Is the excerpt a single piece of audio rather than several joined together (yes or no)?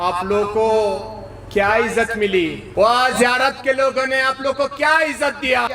no